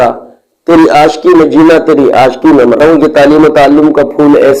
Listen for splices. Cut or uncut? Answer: cut